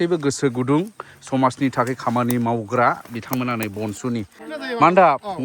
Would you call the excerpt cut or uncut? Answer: cut